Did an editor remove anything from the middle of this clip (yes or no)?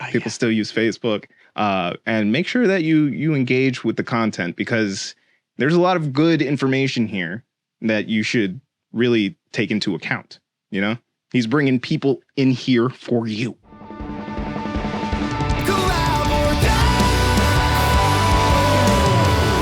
yes